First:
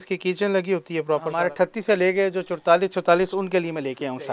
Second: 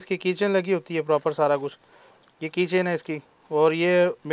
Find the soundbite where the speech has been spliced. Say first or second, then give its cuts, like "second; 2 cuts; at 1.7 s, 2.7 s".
first; 1 cut; at 1.3 s